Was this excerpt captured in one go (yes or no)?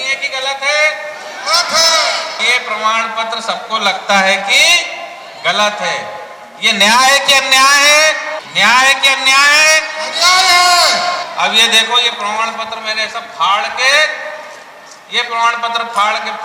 no